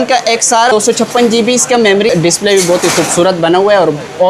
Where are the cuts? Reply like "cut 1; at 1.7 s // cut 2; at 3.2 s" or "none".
cut 1; at 0.7 s // cut 2; at 2.1 s